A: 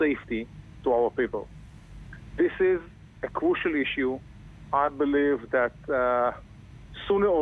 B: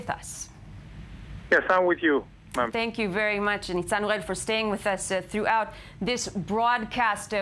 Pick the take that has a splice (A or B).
A